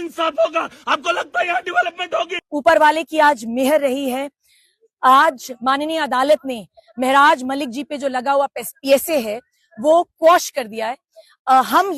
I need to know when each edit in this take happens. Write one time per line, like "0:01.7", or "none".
0:02.4